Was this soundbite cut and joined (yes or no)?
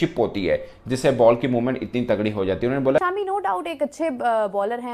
yes